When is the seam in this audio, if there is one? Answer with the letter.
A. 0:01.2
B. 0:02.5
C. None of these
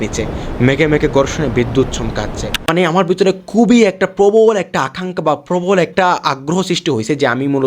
B